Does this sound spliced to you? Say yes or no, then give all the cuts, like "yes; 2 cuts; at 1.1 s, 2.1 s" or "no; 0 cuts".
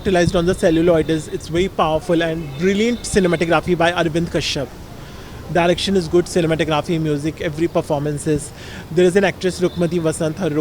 no; 0 cuts